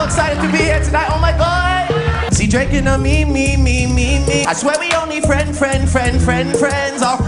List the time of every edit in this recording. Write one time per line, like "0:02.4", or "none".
none